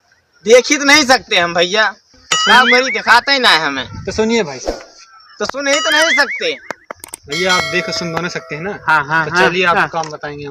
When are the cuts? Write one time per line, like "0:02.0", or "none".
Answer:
none